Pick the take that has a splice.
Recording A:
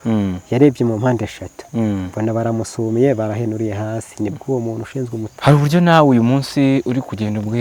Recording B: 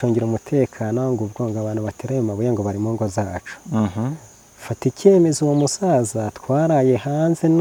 A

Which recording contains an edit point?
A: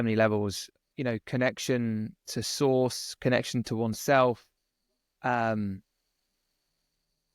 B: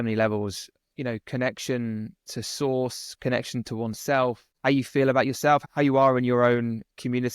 B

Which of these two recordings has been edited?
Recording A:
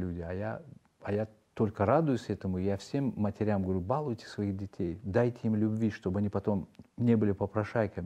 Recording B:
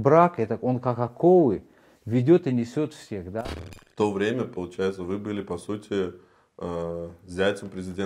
B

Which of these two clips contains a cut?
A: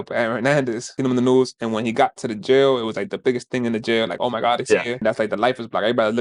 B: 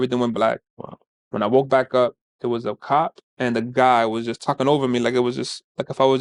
A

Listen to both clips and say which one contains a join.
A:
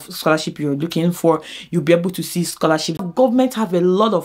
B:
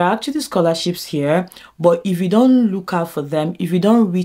A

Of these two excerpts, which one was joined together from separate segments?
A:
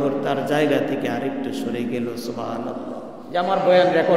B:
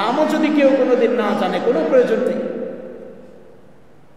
A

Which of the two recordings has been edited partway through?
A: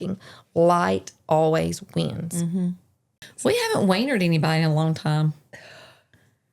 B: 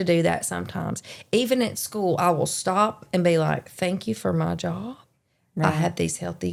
A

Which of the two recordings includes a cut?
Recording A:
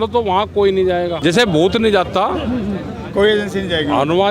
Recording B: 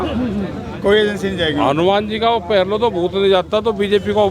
A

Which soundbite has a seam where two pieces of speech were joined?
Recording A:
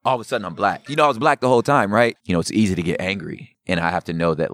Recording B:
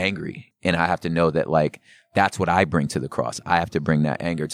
A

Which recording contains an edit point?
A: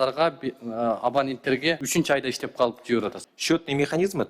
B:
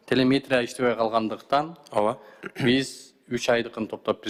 A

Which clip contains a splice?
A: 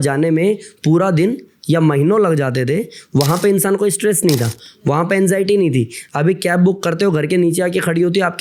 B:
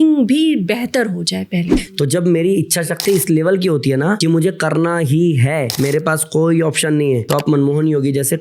B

